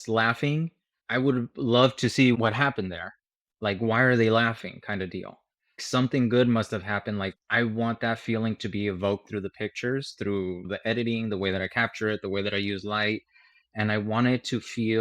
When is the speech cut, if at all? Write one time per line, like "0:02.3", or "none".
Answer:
0:02.4